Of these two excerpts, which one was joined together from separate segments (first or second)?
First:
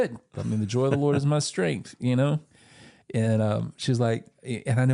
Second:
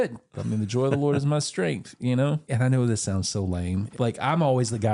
second